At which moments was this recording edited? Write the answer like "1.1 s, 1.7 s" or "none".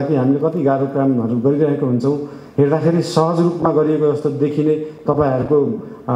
none